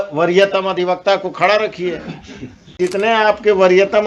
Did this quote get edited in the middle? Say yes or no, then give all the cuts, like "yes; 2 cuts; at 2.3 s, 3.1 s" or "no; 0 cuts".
yes; 1 cut; at 2.8 s